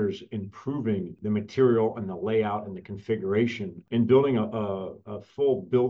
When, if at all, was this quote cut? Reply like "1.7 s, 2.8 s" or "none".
1.2 s, 3.7 s